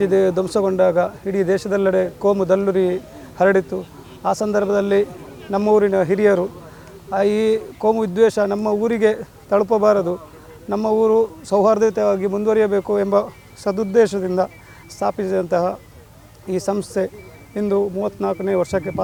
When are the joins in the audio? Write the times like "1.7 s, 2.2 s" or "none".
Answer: none

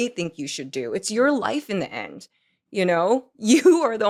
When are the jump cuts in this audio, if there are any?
none

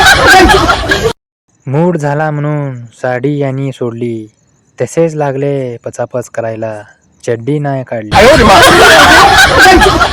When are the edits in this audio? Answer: 1.3 s, 8.1 s

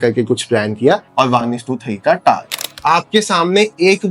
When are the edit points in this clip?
1.1 s, 2.7 s

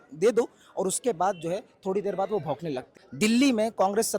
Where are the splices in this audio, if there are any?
2.9 s

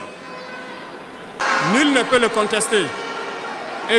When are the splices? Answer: 1.4 s

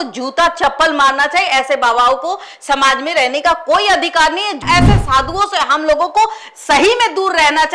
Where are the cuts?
4.6 s

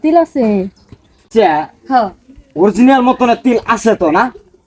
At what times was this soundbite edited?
1.2 s

